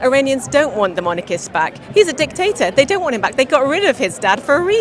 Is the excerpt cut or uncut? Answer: uncut